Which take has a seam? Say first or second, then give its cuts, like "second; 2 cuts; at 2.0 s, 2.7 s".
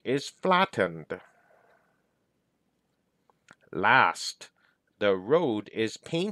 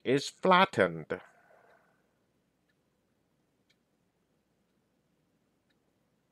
first; 1 cut; at 2.5 s